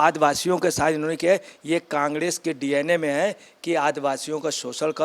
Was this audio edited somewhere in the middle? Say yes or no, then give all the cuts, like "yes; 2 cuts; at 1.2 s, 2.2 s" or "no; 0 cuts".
no; 0 cuts